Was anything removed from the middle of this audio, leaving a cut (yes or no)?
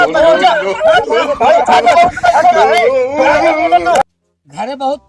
yes